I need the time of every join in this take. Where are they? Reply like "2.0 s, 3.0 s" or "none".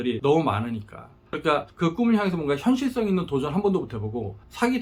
none